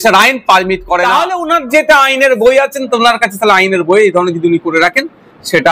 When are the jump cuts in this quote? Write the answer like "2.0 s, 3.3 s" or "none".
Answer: 1.0 s